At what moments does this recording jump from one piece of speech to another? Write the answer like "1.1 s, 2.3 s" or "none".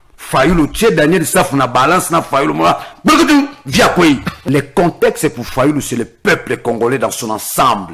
4.3 s